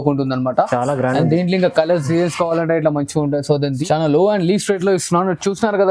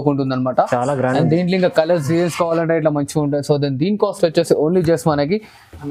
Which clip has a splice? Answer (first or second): first